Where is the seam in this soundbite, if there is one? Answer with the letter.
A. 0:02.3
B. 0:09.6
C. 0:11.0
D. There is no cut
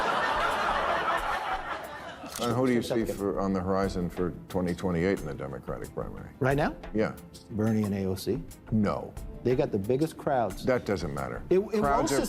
A